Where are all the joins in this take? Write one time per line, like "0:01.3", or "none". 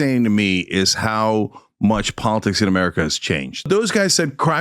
0:03.7